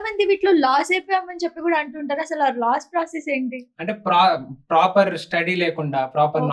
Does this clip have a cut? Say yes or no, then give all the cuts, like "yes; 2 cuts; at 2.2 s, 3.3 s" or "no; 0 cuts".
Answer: no; 0 cuts